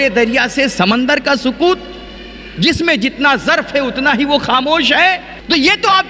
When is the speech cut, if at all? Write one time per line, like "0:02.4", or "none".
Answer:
none